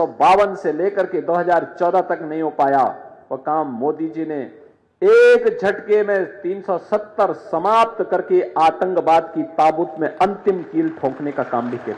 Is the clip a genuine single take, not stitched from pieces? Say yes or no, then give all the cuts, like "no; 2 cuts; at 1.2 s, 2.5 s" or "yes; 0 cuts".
yes; 0 cuts